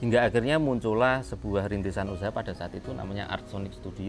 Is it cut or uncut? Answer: uncut